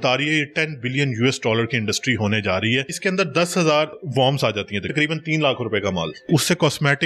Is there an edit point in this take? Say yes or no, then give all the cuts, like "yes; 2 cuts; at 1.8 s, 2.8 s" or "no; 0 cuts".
yes; 3 cuts; at 2.9 s, 4.0 s, 6.3 s